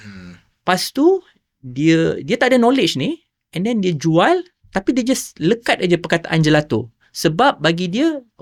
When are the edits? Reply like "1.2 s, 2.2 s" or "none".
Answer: none

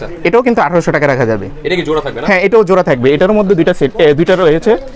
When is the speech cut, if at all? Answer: none

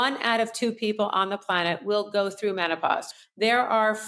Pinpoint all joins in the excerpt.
3.1 s

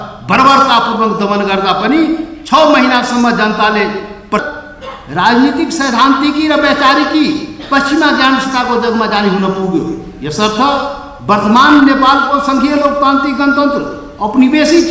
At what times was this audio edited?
4.4 s

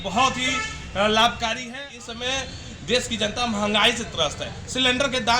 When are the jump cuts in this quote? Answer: 1.7 s

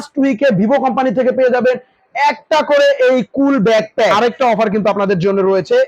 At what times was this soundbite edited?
4.2 s

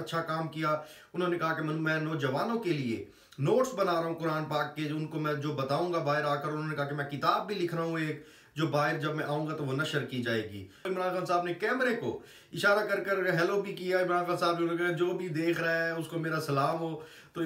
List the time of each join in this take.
10.9 s

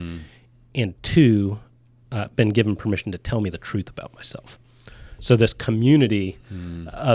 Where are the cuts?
none

